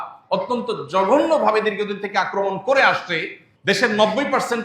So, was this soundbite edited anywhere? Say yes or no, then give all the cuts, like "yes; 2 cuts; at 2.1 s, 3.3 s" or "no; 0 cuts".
yes; 1 cut; at 3.5 s